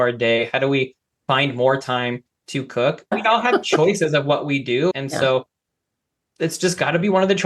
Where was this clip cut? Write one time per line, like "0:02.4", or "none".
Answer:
0:03.1
0:04.9